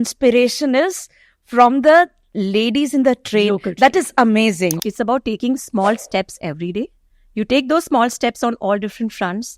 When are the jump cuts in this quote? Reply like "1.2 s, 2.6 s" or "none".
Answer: 4.8 s